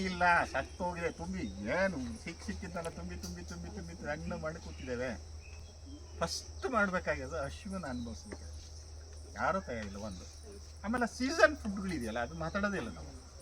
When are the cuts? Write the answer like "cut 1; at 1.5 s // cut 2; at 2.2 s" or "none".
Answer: none